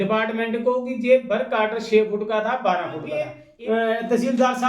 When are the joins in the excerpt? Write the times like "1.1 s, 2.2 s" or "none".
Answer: 3.4 s